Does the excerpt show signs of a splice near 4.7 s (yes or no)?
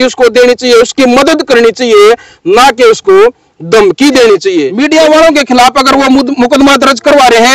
yes